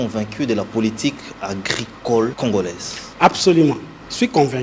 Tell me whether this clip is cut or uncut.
cut